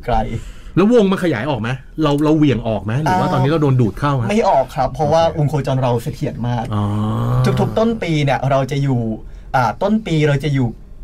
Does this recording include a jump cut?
no; 0 cuts

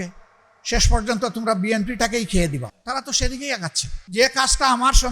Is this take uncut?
no; 2 cuts; at 2.8 s, 3.9 s

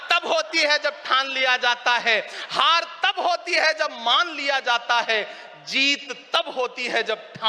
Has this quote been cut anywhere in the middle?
no; 0 cuts

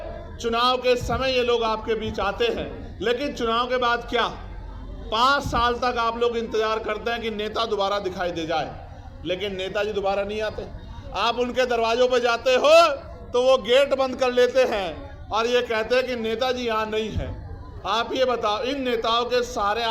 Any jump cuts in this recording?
no; 0 cuts

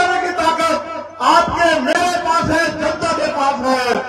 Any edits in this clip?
no; 0 cuts

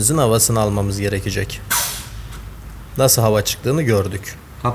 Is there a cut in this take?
no; 0 cuts

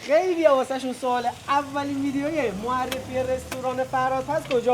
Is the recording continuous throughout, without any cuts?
yes; 0 cuts

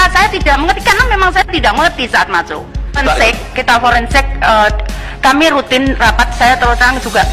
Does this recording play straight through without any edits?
no; 1 cut; at 3.0 s

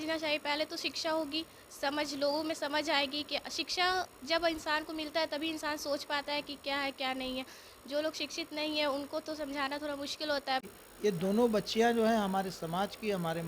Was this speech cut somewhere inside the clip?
yes; 1 cut; at 10.7 s

